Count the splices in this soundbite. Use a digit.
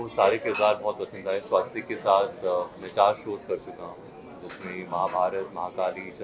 0